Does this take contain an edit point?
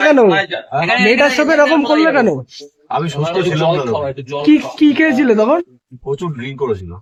no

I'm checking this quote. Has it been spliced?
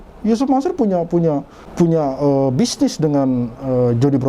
yes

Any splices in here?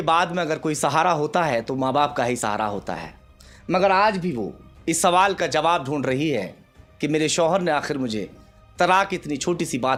no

